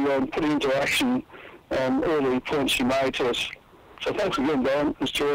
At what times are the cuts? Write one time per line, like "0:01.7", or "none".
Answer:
none

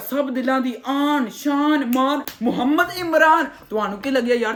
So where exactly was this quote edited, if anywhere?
none

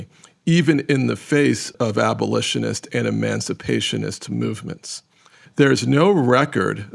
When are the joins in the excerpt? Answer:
0:01.7
0:05.4

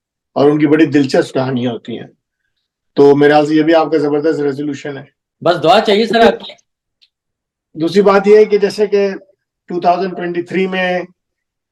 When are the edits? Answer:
none

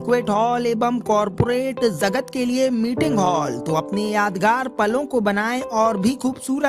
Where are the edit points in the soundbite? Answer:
none

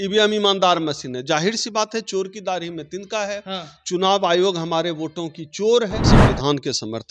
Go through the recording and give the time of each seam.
0:06.0

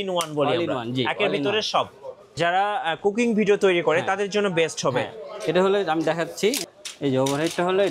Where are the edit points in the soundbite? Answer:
0:02.4

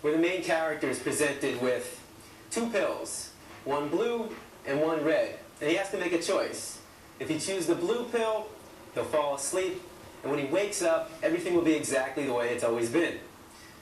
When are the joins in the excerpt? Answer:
0:06.3
0:12.9

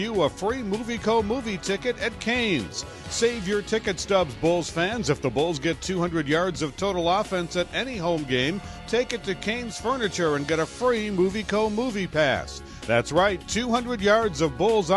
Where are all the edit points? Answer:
none

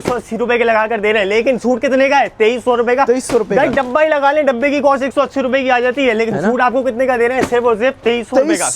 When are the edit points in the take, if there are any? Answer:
none

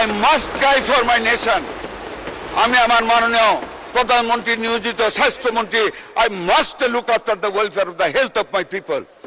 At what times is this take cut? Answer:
none

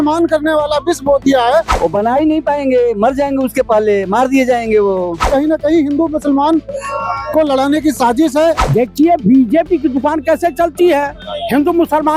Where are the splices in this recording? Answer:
0:01.7
0:05.2
0:08.6

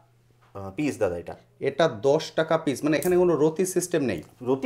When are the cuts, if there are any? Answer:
none

